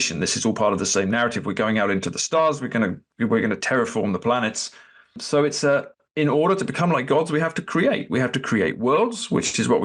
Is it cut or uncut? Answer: cut